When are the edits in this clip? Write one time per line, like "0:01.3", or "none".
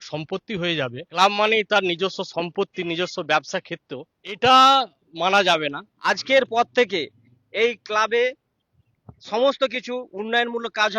0:01.1
0:04.4
0:05.9